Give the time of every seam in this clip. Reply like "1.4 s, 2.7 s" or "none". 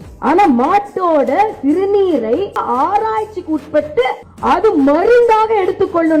2.6 s